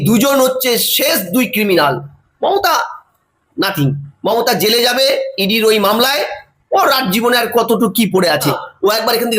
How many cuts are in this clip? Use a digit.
1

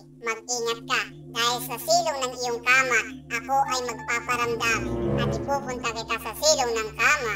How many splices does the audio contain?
1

